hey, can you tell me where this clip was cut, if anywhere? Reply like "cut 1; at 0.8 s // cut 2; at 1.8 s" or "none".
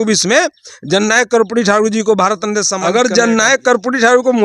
cut 1; at 2.8 s